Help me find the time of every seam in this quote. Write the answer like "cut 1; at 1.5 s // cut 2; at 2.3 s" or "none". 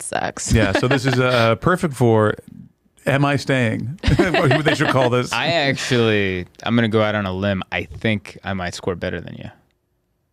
none